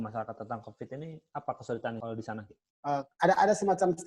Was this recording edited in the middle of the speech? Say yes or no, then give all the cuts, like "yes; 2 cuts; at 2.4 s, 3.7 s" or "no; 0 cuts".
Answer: yes; 1 cut; at 2.4 s